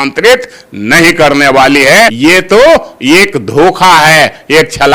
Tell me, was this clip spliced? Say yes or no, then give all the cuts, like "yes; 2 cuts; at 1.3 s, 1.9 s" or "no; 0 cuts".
yes; 1 cut; at 2.1 s